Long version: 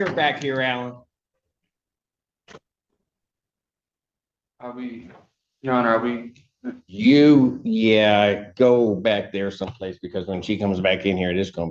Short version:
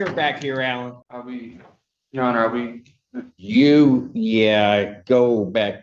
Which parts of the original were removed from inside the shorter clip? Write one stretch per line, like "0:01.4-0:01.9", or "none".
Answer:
0:01.1-0:04.6